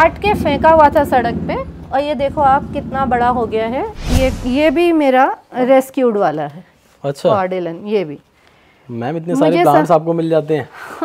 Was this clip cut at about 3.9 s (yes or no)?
yes